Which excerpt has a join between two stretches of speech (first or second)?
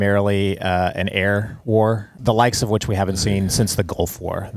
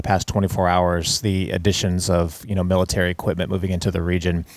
first